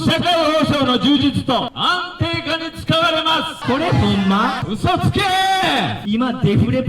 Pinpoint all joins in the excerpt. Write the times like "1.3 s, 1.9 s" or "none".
1.7 s, 3.6 s, 4.6 s, 6.0 s